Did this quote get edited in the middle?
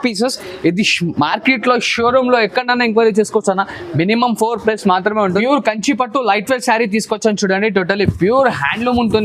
yes; 1 cut; at 5.4 s

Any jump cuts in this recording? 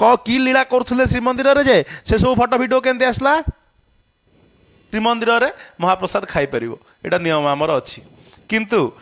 yes; 1 cut; at 4.8 s

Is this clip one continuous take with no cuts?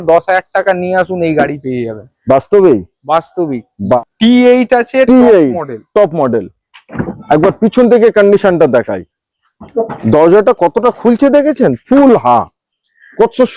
no; 1 cut; at 4.0 s

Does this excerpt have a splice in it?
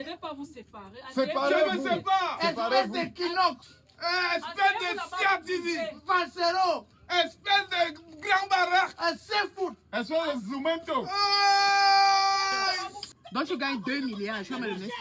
yes; 1 cut; at 12.9 s

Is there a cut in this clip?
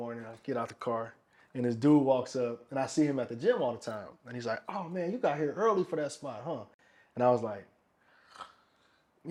no; 0 cuts

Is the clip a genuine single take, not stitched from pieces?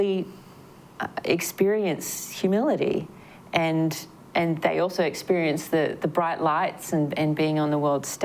yes; 0 cuts

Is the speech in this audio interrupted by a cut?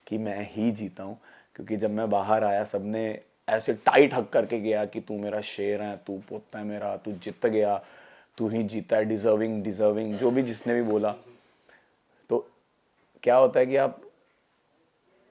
no; 0 cuts

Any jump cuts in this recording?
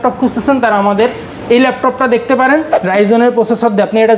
yes; 1 cut; at 2.8 s

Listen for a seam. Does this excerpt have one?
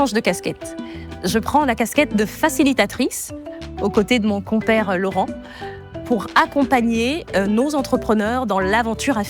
no; 0 cuts

